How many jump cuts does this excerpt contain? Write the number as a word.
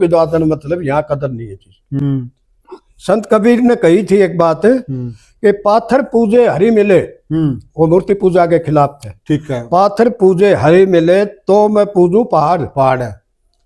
one